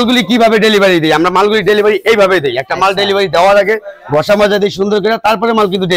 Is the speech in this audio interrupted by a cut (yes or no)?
no